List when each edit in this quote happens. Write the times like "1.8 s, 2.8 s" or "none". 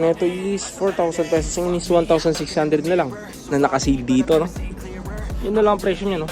3.3 s